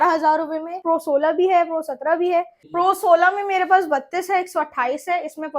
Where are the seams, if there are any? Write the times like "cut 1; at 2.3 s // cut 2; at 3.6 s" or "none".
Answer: cut 1; at 0.8 s // cut 2; at 2.6 s